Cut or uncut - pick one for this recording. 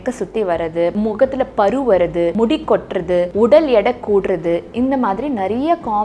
cut